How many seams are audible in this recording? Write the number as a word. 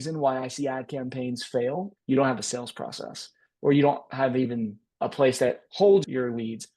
one